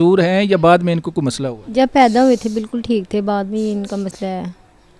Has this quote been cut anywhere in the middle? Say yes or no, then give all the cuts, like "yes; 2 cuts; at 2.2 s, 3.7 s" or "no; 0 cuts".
no; 0 cuts